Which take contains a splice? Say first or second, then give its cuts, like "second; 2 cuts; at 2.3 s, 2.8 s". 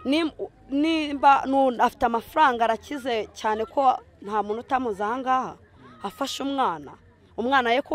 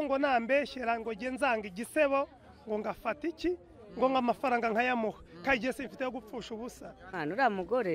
second; 1 cut; at 7.0 s